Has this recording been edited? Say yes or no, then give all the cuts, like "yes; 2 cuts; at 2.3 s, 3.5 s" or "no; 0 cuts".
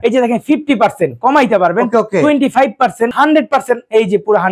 yes; 1 cut; at 3.1 s